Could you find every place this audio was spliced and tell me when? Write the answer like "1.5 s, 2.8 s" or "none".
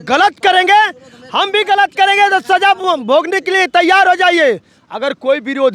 none